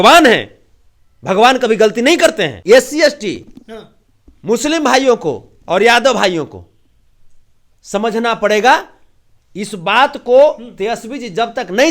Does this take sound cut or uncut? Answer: cut